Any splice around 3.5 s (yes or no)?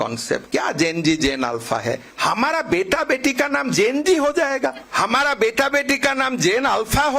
no